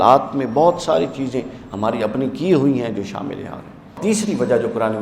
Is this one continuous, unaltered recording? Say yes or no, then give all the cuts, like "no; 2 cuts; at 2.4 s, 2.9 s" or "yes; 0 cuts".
no; 1 cut; at 4.0 s